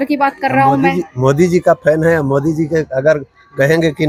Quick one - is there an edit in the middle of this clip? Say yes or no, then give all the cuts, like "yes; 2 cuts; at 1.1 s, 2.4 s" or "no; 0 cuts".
no; 0 cuts